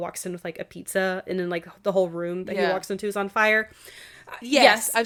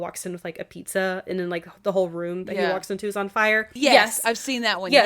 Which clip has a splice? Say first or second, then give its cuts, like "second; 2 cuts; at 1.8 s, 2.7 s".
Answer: second; 1 cut; at 3.7 s